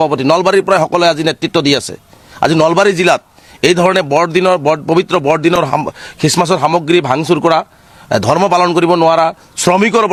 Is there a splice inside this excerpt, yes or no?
no